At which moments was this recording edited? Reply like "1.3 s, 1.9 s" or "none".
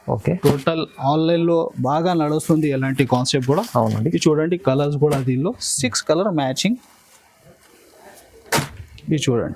none